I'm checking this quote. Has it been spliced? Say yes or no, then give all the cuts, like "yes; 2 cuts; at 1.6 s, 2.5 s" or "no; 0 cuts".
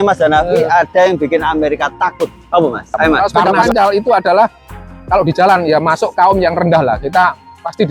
yes; 1 cut; at 3.7 s